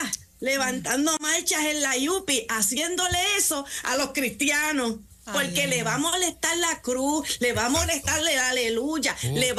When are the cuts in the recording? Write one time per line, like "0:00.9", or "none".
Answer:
none